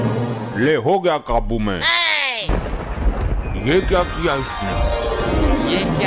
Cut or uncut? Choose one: cut